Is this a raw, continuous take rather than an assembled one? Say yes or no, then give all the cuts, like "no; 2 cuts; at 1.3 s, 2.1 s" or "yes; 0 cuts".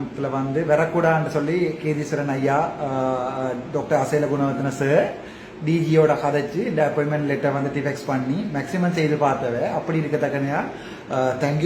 yes; 0 cuts